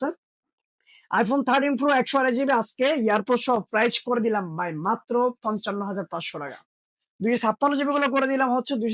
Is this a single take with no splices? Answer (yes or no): yes